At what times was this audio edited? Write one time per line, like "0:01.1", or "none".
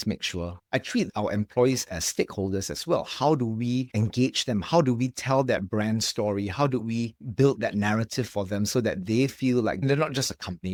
none